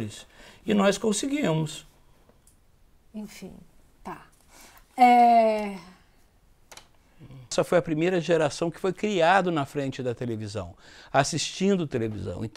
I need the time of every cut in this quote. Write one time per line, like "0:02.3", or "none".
0:07.5